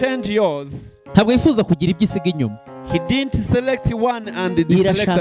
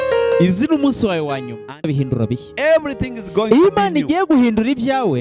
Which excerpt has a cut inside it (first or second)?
second